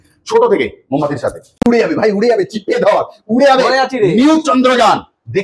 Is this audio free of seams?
no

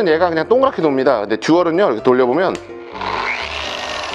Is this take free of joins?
yes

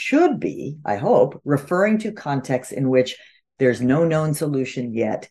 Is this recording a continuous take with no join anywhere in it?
yes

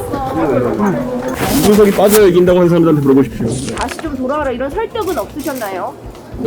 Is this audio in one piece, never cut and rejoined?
no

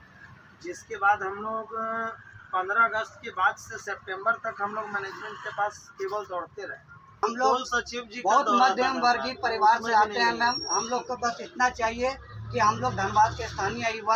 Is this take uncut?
no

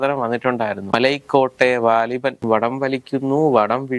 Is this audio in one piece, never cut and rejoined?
no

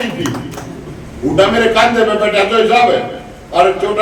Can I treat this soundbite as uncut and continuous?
yes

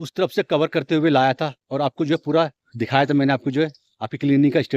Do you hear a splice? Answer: no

